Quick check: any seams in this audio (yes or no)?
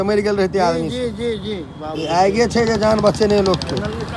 no